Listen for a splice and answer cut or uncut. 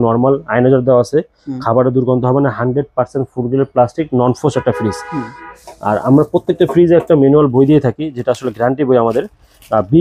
uncut